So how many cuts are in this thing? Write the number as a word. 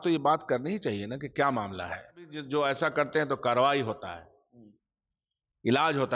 one